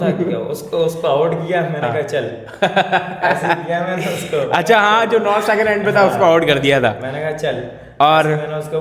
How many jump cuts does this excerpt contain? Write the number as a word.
zero